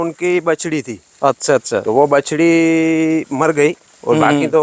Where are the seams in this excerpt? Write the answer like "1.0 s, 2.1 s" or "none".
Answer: none